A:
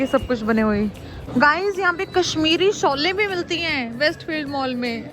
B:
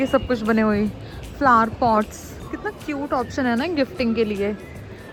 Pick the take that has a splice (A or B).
A